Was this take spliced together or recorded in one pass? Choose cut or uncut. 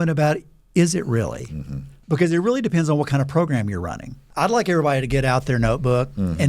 cut